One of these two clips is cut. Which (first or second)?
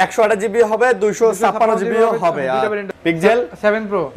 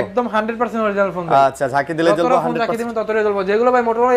first